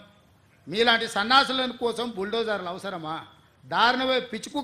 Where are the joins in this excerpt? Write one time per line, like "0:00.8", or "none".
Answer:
none